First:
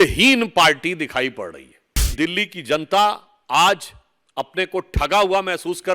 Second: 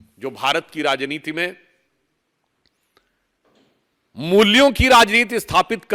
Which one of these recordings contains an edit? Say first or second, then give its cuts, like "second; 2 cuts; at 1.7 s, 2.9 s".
first; 1 cut; at 2.1 s